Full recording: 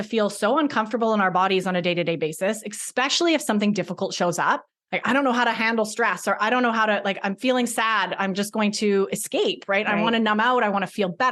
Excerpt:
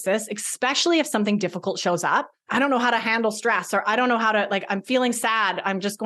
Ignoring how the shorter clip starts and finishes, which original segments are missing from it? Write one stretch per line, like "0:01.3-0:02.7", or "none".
0:04.7-0:04.9